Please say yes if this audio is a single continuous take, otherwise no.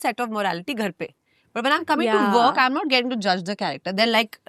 yes